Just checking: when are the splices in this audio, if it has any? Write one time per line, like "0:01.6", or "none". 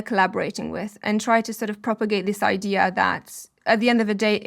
0:03.5